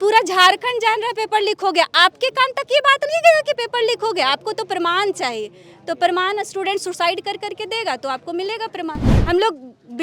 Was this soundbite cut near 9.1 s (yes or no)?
yes